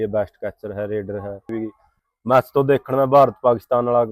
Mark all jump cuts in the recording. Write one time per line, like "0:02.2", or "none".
0:01.5